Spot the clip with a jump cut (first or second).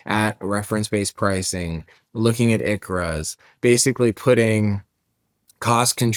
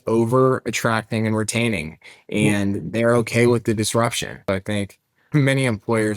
second